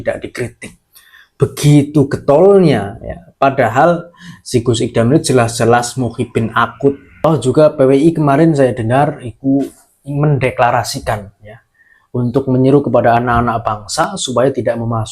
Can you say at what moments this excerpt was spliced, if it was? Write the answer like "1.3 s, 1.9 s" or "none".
7.1 s